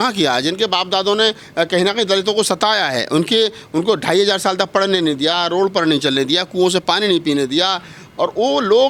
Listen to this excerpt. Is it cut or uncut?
uncut